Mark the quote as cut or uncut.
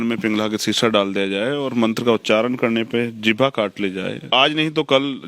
cut